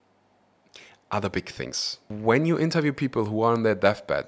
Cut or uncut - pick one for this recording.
cut